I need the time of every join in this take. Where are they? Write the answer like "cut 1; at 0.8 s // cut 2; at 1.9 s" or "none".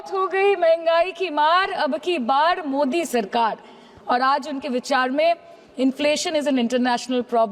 none